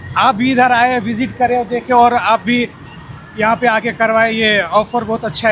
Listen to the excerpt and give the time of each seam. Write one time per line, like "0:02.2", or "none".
none